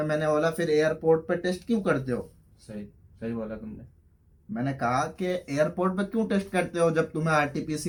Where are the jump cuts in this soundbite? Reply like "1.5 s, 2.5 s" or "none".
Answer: none